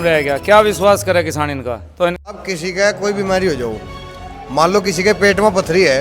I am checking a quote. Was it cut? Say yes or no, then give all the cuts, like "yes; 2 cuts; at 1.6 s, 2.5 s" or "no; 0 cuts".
yes; 1 cut; at 2.3 s